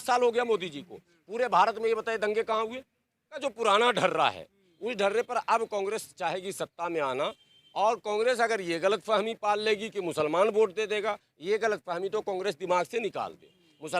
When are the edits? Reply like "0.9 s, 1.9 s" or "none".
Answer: 3.4 s